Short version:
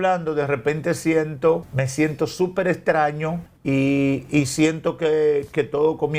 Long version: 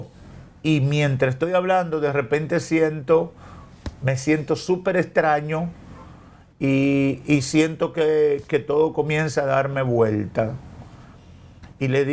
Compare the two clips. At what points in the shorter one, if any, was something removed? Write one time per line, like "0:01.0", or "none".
0:01.8
0:03.5